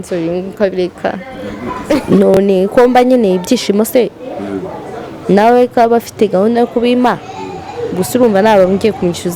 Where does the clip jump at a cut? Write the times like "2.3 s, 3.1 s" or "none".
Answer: 2.0 s